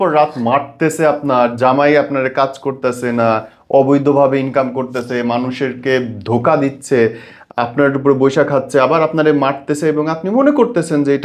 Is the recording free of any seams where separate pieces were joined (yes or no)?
yes